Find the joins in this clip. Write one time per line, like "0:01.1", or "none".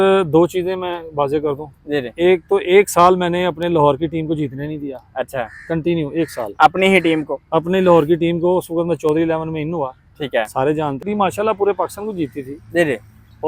0:11.1